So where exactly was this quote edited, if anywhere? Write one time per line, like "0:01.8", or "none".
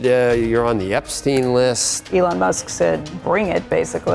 0:01.9
0:03.1